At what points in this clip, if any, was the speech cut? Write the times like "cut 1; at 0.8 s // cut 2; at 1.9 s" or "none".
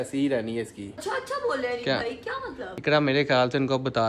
cut 1; at 1.0 s // cut 2; at 2.7 s